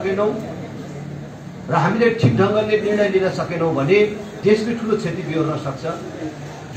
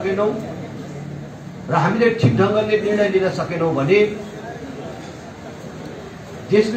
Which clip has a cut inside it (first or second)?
first